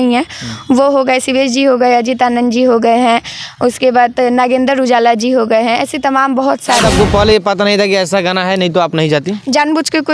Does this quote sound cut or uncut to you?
cut